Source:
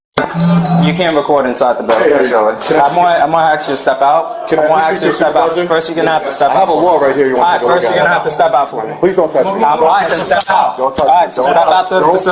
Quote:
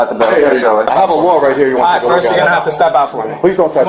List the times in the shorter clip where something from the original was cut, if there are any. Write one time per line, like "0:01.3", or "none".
0:00.9